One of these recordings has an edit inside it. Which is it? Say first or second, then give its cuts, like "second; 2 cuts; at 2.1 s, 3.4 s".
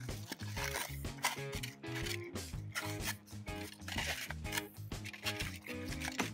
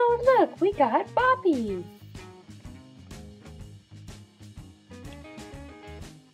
first; 1 cut; at 3.7 s